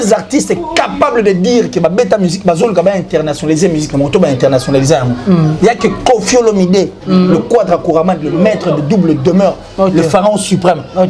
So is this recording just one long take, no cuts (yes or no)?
yes